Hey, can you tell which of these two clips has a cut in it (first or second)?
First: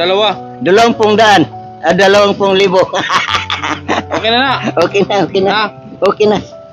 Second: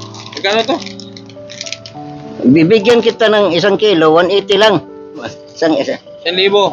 second